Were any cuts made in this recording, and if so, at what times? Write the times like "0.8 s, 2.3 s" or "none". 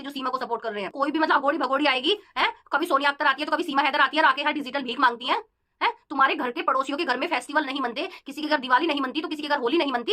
0.9 s